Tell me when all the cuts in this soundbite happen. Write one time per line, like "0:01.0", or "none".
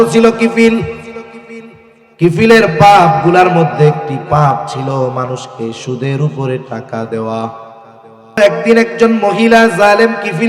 0:08.4